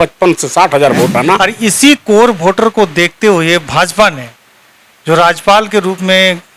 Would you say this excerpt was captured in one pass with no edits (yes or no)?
no